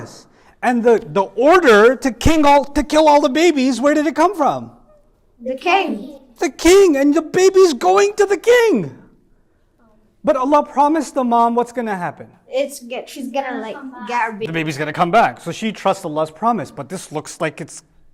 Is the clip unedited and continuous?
yes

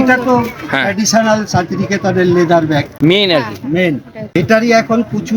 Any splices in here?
yes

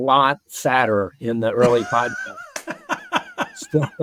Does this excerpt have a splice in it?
no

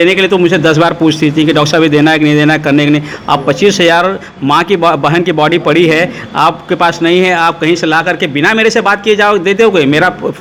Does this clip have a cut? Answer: no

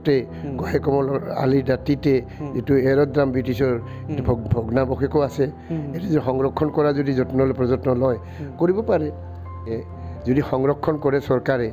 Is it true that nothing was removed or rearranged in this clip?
no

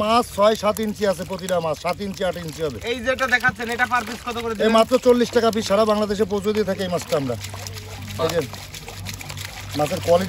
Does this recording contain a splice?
no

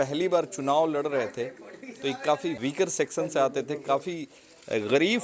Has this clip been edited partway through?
yes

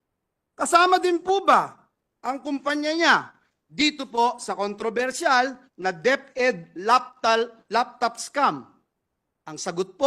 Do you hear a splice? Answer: no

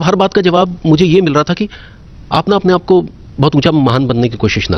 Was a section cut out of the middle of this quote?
no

